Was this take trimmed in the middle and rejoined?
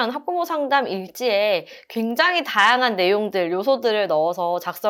no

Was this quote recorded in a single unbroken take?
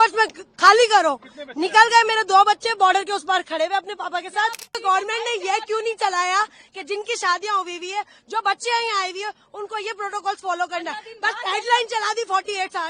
no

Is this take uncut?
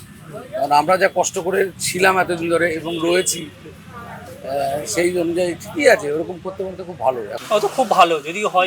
no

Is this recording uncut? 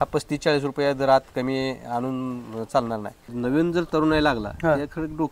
no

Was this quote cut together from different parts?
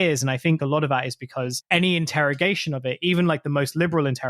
yes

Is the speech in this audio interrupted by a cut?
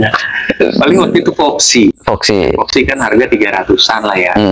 no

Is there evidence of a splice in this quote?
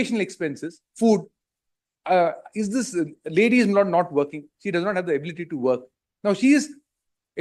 no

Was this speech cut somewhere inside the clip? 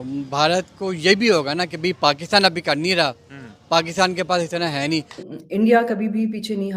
yes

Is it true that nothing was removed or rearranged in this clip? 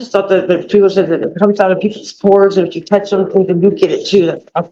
yes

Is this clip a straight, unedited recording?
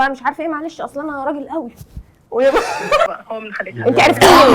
no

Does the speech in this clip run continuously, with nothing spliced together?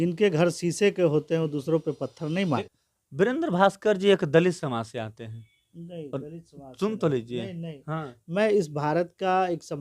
no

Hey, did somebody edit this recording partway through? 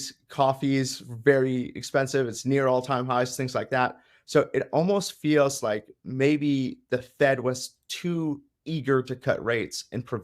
no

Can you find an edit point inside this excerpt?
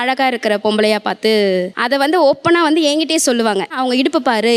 no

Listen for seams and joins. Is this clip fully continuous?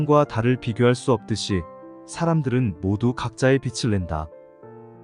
yes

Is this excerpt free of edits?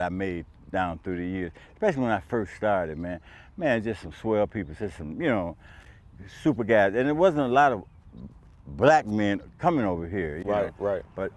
yes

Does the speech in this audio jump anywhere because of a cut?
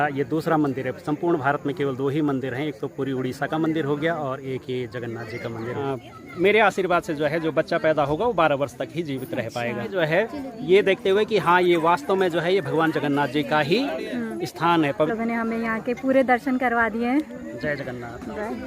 yes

